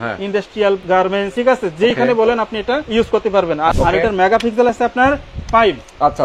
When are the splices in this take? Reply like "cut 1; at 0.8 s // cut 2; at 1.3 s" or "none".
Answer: cut 1; at 1.1 s // cut 2; at 2.9 s // cut 3; at 3.7 s